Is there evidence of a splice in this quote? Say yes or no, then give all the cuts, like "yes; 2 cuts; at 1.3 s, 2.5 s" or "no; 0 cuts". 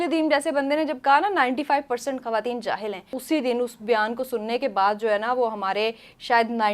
yes; 1 cut; at 3.2 s